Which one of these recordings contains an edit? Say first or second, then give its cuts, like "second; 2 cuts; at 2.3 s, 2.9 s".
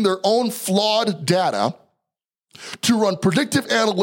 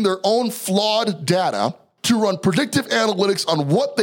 second; 1 cut; at 1.9 s